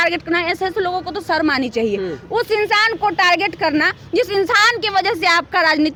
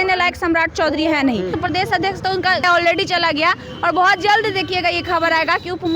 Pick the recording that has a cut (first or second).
second